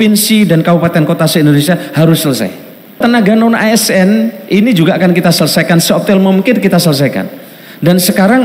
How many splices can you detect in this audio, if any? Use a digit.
1